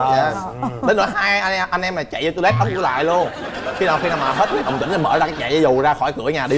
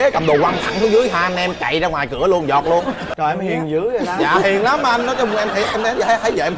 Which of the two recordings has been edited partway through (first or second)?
second